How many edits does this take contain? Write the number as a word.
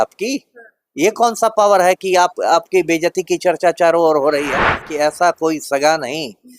one